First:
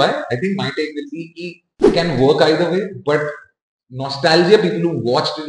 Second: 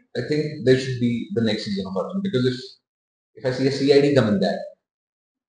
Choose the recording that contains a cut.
first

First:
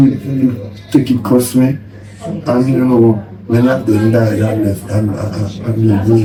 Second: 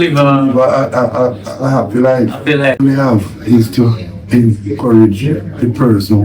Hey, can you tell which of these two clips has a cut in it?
second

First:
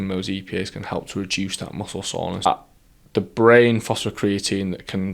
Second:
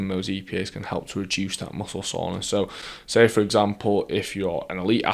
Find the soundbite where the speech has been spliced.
first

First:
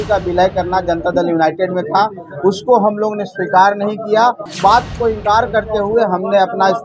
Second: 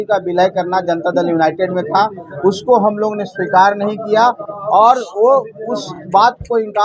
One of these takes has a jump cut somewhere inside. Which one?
first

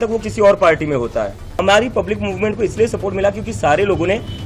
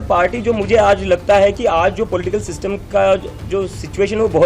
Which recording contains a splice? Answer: first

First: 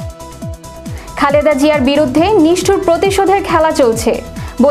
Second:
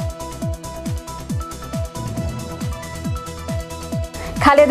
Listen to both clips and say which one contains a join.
first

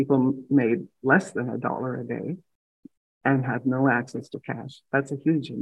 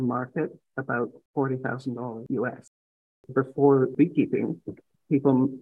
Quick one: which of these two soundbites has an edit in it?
second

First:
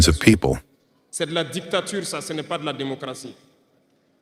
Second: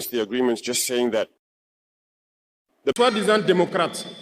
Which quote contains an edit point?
second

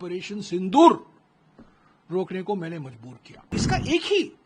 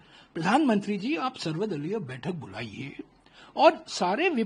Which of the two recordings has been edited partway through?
first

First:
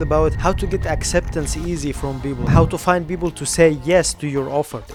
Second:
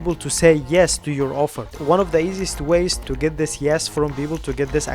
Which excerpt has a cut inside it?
second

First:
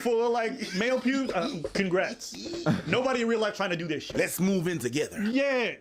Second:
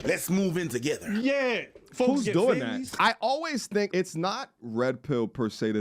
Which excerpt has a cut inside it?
second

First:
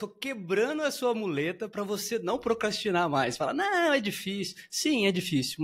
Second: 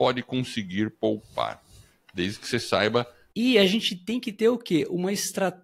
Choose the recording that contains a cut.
second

